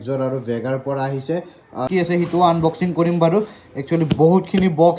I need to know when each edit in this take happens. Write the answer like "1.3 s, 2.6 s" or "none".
none